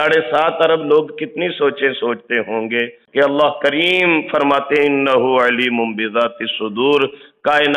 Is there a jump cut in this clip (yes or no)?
yes